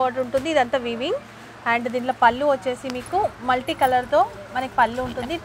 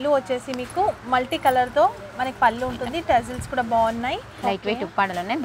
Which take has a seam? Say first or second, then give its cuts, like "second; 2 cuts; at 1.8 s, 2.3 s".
second; 1 cut; at 4.3 s